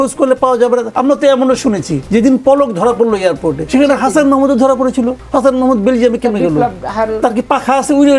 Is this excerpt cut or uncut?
cut